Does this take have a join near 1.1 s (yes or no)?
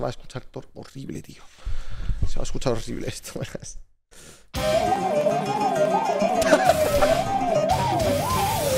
no